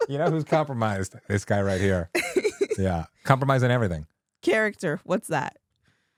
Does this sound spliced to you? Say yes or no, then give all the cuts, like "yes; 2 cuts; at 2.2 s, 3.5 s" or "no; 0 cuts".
no; 0 cuts